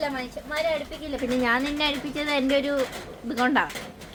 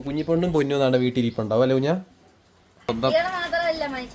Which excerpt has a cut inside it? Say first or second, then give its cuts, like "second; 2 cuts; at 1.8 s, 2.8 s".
second; 1 cut; at 2.9 s